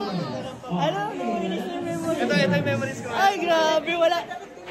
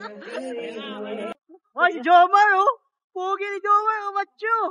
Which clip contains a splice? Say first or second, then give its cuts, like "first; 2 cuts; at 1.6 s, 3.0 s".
second; 1 cut; at 1.3 s